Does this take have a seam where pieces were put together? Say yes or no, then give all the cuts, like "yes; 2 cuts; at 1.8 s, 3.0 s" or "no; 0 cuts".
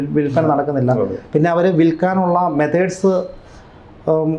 no; 0 cuts